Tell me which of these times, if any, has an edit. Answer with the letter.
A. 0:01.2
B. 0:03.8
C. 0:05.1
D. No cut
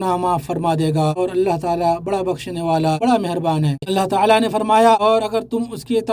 B